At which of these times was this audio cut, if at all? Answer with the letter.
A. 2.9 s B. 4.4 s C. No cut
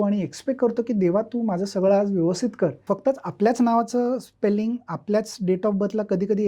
A